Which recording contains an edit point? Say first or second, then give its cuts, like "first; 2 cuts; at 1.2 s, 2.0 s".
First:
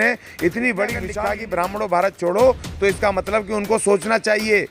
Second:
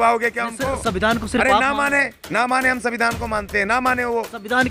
first; 1 cut; at 1.1 s